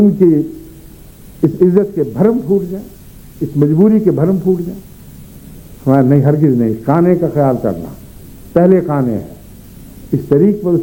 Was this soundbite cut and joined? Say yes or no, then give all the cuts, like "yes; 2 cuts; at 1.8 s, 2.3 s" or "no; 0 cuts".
no; 0 cuts